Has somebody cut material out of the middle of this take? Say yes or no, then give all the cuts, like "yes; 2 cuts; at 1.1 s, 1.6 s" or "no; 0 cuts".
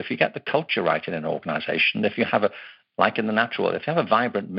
no; 0 cuts